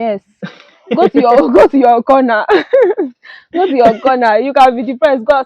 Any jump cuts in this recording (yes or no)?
no